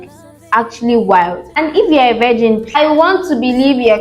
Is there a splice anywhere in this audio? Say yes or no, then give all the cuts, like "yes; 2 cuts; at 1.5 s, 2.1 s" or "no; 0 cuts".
yes; 2 cuts; at 1.4 s, 2.7 s